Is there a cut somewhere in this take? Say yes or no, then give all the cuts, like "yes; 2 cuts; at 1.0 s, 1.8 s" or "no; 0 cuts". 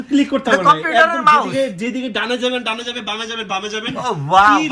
no; 0 cuts